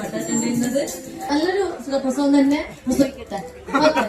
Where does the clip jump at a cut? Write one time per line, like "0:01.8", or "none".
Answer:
0:01.3

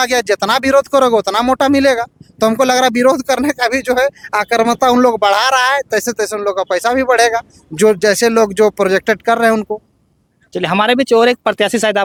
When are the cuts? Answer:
none

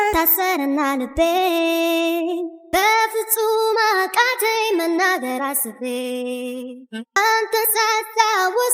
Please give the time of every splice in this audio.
none

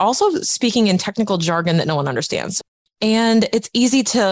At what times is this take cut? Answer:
0:02.5

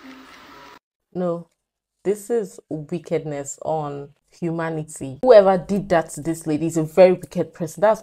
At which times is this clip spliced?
none

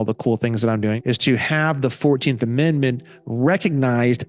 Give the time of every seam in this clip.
0:01.0

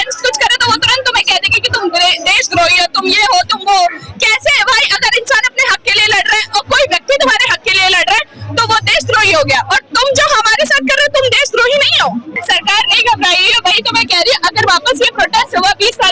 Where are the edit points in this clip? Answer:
0:12.3

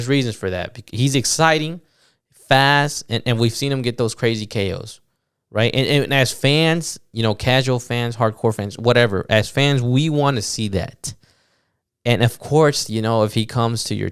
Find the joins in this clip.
none

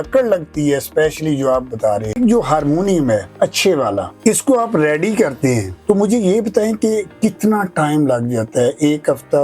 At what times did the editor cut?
0:02.2

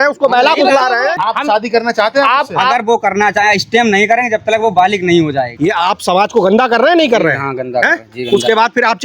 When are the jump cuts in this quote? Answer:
0:01.1
0:05.6

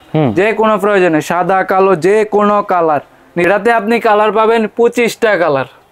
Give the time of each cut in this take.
0:03.5

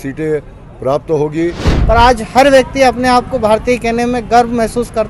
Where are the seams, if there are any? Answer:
0:01.7

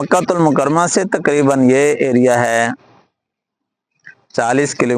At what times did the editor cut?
0:02.1

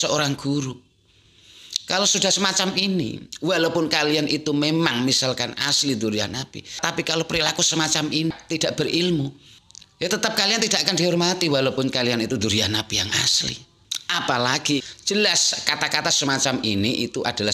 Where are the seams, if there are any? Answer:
0:14.8

